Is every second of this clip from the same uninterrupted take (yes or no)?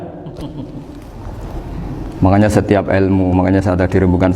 no